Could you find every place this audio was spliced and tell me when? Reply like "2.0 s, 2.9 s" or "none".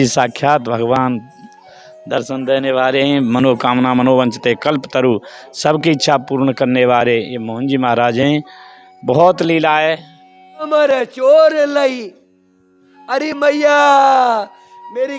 10.7 s